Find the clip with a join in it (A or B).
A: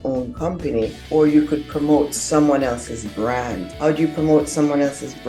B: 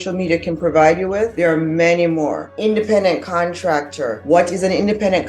B